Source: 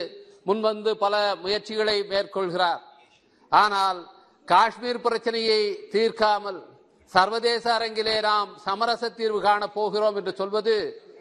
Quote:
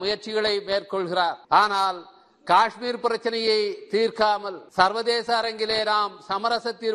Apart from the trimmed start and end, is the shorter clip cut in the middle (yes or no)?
yes